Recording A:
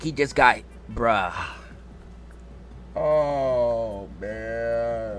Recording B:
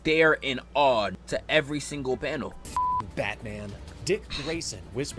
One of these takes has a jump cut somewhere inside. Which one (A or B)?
B